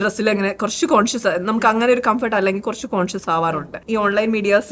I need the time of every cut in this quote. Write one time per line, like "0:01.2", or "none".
0:03.8

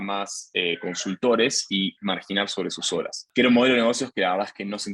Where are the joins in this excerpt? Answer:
0:03.2

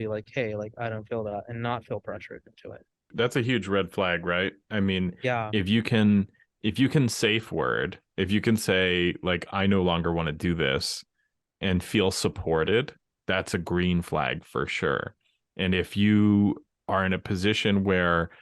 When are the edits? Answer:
0:03.0

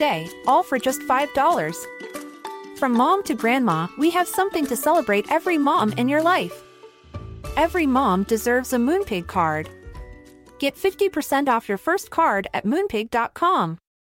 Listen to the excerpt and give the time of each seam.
none

